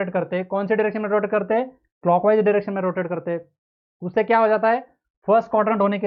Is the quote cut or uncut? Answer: uncut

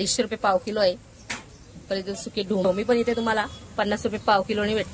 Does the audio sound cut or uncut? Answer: cut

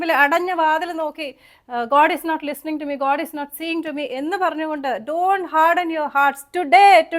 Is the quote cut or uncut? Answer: uncut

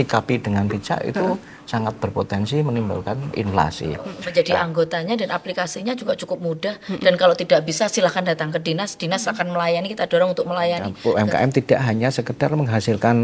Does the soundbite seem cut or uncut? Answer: cut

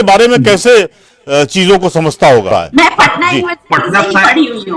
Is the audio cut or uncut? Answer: cut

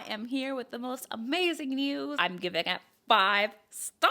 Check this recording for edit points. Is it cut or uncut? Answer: cut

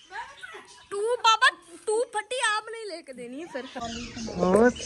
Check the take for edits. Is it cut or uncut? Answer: cut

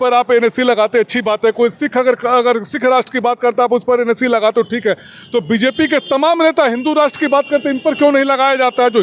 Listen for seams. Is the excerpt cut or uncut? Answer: uncut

